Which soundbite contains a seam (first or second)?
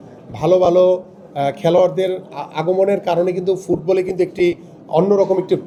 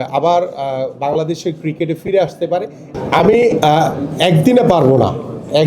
second